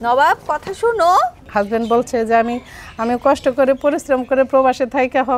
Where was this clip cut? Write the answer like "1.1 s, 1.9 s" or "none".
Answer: 1.4 s